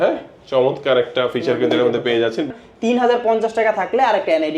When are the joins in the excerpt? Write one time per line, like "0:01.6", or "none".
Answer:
0:02.5